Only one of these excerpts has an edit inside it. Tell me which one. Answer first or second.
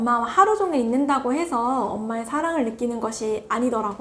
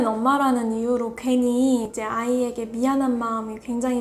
second